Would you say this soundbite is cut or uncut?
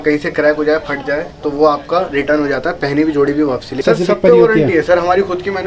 cut